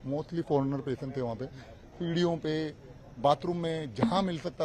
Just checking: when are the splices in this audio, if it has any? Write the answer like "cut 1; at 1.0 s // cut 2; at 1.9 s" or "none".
none